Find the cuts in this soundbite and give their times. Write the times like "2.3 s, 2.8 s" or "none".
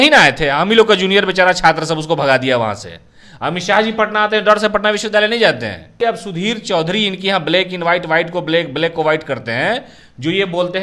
6.0 s